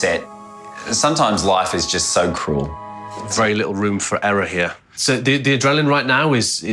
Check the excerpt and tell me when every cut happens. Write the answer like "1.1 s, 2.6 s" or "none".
3.1 s